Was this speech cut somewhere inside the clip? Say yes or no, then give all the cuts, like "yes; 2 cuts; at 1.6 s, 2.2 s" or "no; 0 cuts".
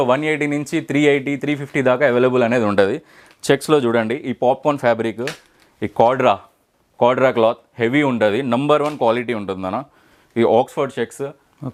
no; 0 cuts